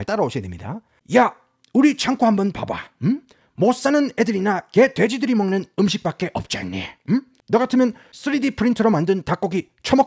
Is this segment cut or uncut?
cut